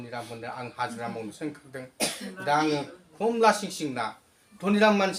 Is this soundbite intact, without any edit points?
yes; 0 cuts

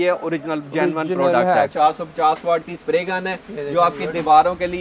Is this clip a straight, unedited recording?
no; 1 cut; at 1.7 s

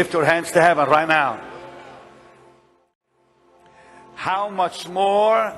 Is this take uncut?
yes; 0 cuts

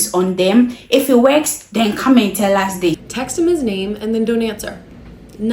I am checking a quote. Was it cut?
yes; 1 cut; at 3.1 s

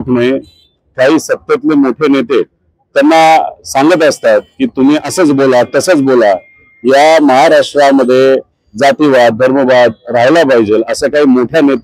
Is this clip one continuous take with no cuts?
yes; 0 cuts

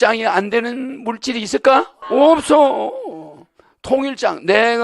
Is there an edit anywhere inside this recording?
yes; 1 cut; at 2.0 s

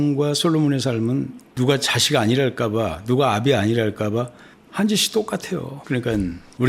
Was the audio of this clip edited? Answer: no; 0 cuts

